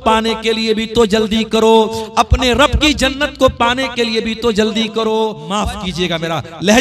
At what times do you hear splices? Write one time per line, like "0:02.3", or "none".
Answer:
0:05.4